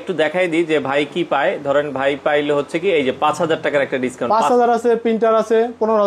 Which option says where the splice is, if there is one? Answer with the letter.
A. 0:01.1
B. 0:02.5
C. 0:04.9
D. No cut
D